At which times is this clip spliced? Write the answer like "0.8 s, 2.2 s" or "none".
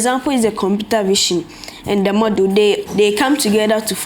2.8 s